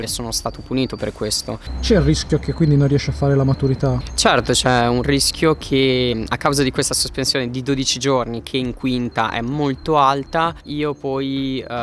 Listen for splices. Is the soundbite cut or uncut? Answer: cut